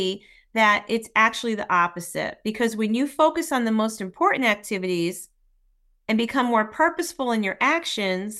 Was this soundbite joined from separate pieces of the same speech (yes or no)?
no